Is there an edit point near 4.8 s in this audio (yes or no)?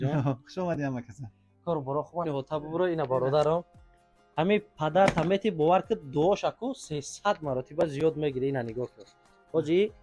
no